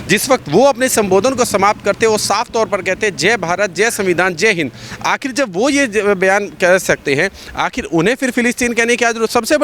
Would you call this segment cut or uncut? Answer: uncut